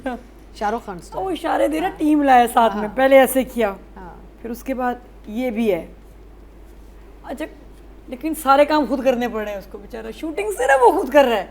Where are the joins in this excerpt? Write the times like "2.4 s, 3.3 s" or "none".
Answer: none